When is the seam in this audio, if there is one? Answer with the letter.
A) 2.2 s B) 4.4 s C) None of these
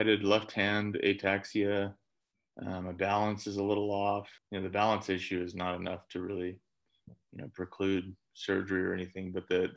B